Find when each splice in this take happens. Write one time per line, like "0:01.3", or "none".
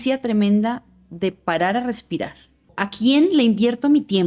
0:02.8